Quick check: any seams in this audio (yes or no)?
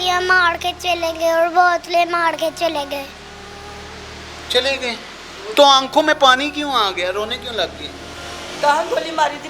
no